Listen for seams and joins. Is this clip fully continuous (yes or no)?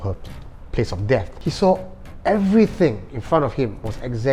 no